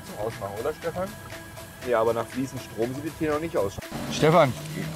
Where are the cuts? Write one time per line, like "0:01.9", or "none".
0:01.3
0:03.8